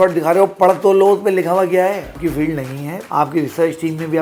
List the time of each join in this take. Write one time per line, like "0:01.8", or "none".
0:02.2